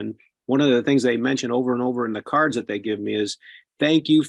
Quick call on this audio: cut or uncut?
uncut